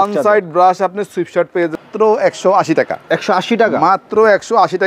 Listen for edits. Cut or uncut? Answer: cut